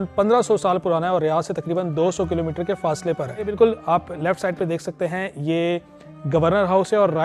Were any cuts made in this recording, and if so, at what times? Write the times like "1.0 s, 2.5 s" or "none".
3.5 s